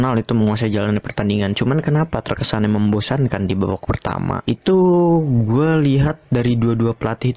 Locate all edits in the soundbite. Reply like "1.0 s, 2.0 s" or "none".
4.4 s